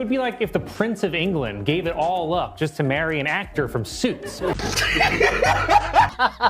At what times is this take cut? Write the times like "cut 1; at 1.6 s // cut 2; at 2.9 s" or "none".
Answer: cut 1; at 4.6 s